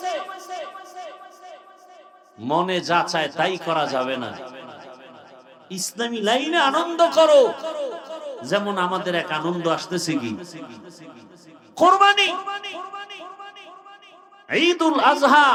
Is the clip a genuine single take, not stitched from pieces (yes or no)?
yes